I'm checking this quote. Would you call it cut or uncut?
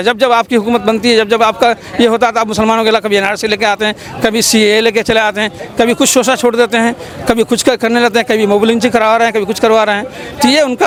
uncut